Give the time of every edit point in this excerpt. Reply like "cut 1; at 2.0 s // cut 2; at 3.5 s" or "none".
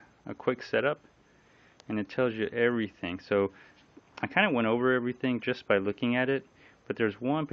cut 1; at 6.0 s

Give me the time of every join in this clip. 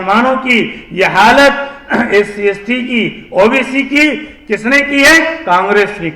none

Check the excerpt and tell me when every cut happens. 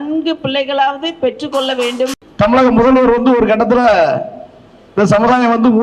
cut 1; at 2.1 s

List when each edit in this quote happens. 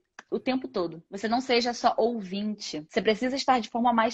cut 1; at 2.8 s

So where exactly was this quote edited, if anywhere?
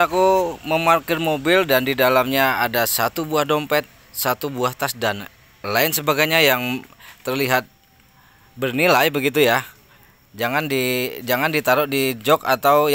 none

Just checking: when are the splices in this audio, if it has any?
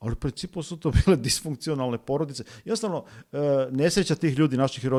none

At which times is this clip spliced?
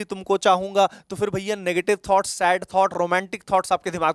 none

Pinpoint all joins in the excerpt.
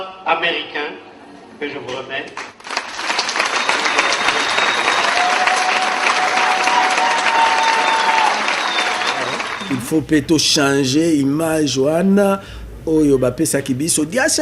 cut 1; at 9.5 s

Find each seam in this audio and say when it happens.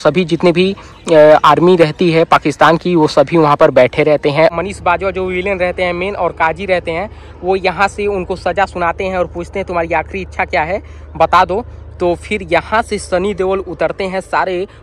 cut 1; at 4.5 s

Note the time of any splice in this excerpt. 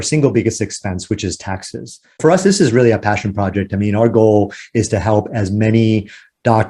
cut 1; at 2.2 s

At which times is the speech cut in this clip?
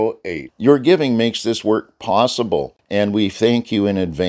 cut 1; at 2.8 s

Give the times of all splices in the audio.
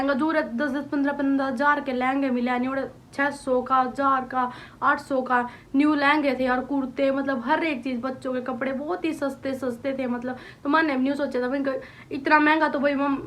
none

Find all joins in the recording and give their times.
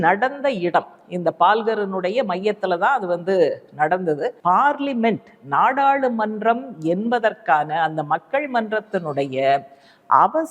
cut 1; at 4.4 s

